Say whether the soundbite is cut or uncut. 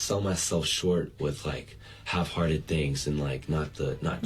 uncut